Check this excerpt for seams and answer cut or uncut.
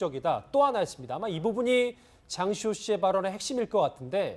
cut